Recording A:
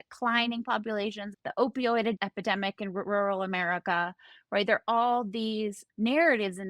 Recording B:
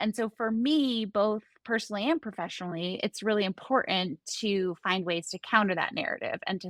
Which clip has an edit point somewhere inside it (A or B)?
A